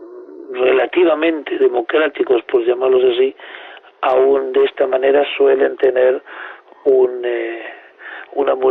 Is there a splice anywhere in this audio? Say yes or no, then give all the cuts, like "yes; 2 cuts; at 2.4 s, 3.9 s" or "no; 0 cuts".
yes; 1 cut; at 2.8 s